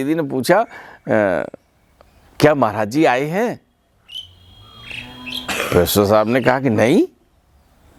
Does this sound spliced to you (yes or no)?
no